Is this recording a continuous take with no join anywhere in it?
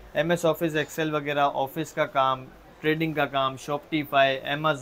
yes; 0 cuts

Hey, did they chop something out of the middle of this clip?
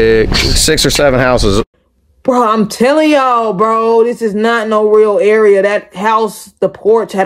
no; 0 cuts

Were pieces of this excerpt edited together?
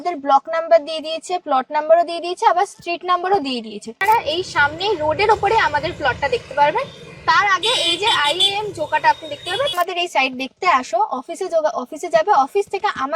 yes; 2 cuts; at 3.9 s, 9.7 s

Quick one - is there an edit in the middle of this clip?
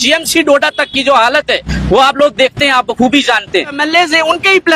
yes; 1 cut; at 3.8 s

